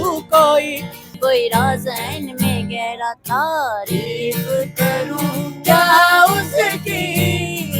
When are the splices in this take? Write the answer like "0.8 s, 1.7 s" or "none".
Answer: 1.0 s